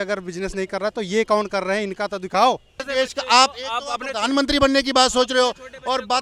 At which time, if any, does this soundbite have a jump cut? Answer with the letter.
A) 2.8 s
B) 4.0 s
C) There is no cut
A